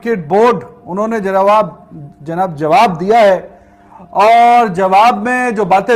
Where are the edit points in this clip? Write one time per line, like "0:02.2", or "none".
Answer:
none